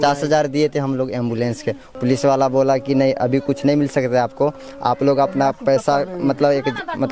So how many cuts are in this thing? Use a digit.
1